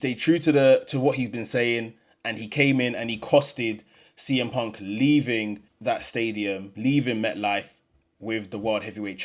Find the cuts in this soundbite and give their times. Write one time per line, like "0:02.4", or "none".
0:05.7
0:06.7